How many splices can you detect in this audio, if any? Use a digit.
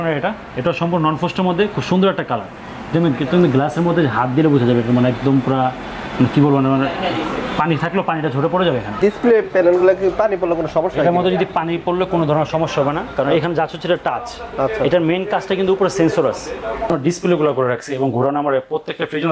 2